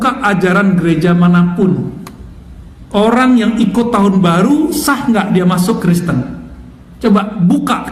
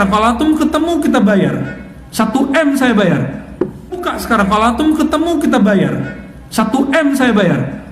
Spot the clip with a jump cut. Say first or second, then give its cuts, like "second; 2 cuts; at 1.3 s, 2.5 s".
second; 1 cut; at 4.0 s